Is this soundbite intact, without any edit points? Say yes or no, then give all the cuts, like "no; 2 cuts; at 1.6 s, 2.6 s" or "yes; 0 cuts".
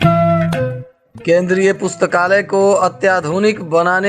no; 1 cut; at 1.0 s